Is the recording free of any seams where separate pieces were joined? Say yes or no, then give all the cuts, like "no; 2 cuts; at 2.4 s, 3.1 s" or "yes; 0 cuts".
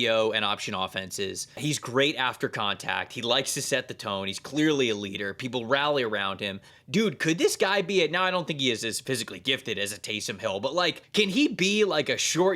no; 3 cuts; at 1.6 s, 6.7 s, 11.0 s